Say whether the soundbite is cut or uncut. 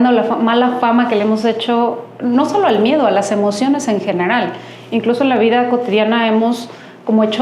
uncut